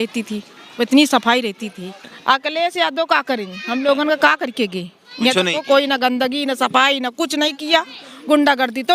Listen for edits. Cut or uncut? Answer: cut